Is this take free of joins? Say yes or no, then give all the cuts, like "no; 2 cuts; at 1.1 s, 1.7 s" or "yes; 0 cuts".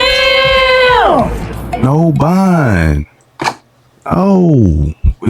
no; 1 cut; at 1.3 s